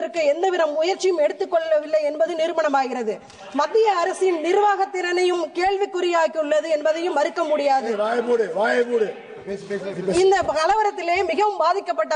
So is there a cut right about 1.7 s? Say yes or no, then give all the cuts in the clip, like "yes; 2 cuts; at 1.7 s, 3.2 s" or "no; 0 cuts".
no; 0 cuts